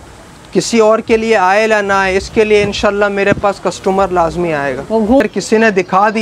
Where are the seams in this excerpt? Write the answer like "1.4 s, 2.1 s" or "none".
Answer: 5.2 s